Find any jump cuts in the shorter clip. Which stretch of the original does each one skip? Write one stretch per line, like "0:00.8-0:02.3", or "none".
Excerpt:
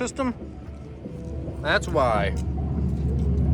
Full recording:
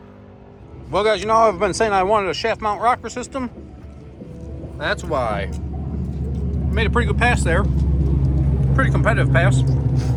none